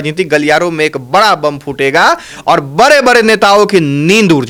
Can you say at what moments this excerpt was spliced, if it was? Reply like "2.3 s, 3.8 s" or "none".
none